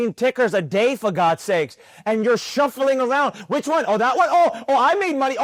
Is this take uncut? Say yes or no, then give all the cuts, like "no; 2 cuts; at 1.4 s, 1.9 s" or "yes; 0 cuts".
yes; 0 cuts